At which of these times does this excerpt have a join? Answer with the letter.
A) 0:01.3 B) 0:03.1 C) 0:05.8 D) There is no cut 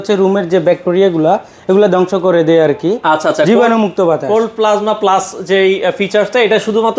D